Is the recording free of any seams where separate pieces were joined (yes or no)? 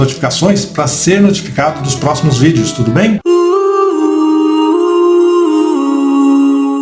yes